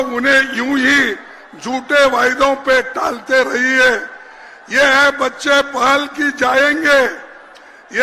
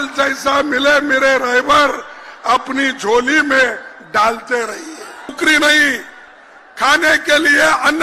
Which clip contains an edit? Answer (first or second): second